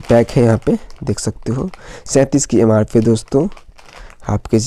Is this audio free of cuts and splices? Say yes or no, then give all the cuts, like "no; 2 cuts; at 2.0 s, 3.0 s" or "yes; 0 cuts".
yes; 0 cuts